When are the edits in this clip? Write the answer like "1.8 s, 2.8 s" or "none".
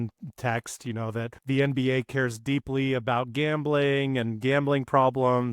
1.4 s